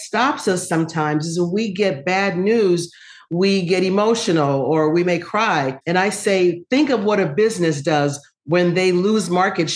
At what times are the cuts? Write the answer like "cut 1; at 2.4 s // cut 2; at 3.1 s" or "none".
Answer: none